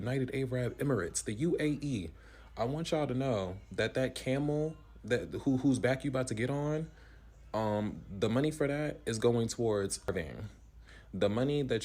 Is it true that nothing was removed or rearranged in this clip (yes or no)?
no